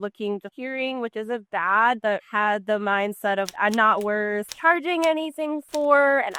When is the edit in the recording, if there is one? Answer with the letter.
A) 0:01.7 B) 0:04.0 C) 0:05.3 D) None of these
D